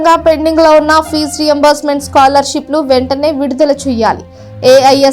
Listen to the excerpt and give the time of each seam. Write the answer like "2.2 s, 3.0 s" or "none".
none